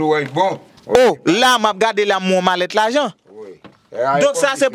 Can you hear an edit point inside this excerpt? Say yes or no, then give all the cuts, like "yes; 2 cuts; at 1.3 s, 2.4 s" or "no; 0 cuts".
no; 0 cuts